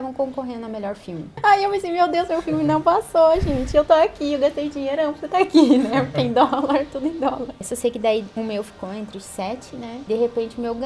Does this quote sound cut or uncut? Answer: cut